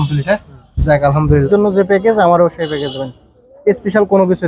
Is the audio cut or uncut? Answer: cut